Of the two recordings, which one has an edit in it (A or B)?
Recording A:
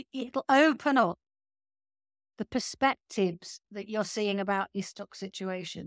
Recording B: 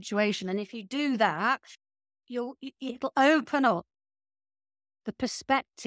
B